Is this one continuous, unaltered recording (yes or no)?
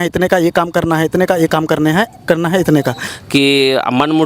no